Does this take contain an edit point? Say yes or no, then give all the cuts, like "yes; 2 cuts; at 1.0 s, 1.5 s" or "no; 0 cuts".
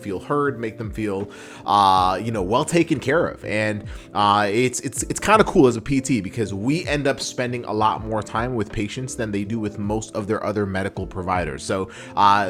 no; 0 cuts